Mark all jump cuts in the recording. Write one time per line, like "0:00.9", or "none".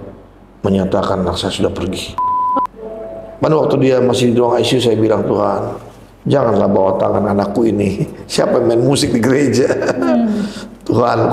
0:02.6